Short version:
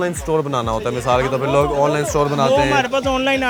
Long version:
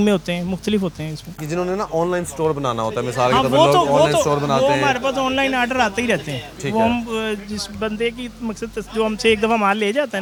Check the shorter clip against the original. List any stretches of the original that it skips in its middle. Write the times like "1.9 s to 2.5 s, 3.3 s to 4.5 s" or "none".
none